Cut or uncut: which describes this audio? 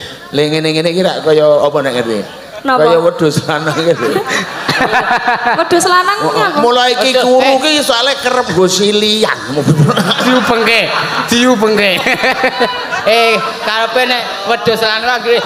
uncut